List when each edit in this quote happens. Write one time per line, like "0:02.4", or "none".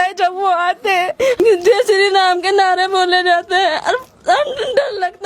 0:01.4

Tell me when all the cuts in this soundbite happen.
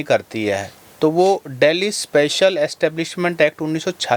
none

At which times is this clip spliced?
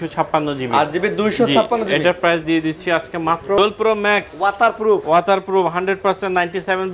0:03.6

